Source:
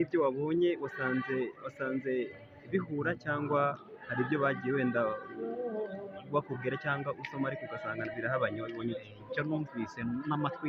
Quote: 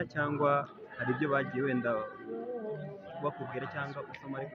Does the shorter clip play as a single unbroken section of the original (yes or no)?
yes